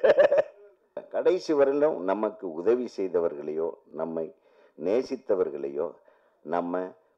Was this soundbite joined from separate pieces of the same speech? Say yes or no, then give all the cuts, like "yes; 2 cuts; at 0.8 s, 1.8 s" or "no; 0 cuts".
yes; 1 cut; at 1.0 s